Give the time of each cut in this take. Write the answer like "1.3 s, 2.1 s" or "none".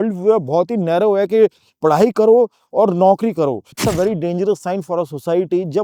3.8 s